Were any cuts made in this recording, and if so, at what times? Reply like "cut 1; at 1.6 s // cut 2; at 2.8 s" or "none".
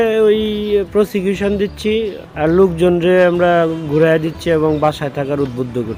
none

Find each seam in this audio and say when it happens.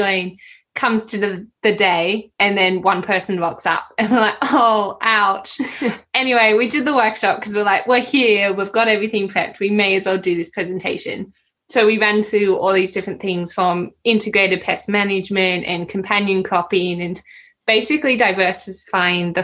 none

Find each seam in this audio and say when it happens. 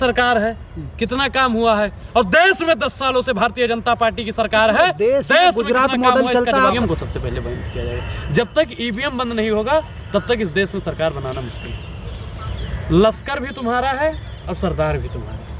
cut 1; at 6.7 s // cut 2; at 12.5 s

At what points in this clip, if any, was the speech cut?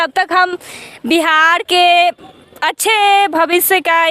none

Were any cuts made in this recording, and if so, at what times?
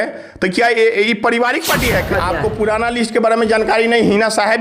cut 1; at 2.1 s

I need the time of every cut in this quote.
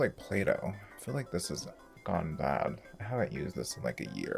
none

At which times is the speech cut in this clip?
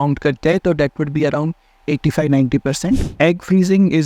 cut 1; at 3.1 s

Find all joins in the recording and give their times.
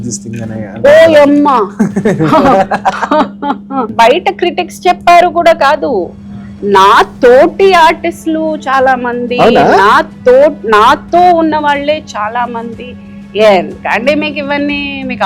cut 1; at 3.9 s

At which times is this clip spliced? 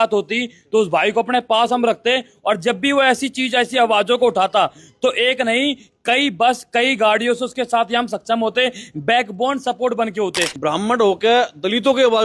cut 1; at 10.5 s

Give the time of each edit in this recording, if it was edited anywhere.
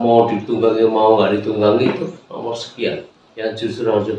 cut 1; at 3.2 s

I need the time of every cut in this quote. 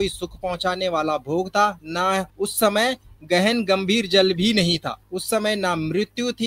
cut 1; at 2.3 s // cut 2; at 5.0 s

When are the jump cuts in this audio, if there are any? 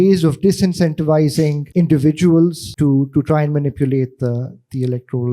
cut 1; at 1.6 s // cut 2; at 2.6 s

